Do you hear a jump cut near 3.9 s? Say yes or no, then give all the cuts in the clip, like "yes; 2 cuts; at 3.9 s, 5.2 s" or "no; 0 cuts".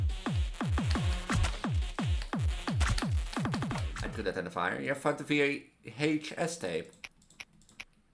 yes; 1 cut; at 3.9 s